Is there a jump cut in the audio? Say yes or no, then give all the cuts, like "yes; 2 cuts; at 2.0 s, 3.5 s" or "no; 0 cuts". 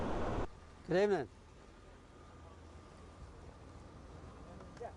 yes; 1 cut; at 1.5 s